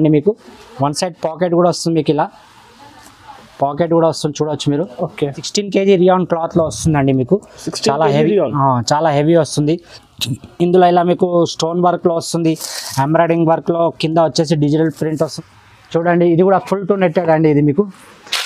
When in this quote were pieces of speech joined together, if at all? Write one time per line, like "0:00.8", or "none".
0:05.4
0:15.3